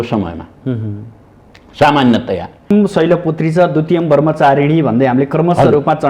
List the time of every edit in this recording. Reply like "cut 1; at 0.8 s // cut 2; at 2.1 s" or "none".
cut 1; at 2.7 s